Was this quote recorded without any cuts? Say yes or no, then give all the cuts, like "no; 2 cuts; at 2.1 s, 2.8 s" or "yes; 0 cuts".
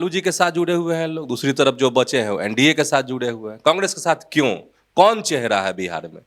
yes; 0 cuts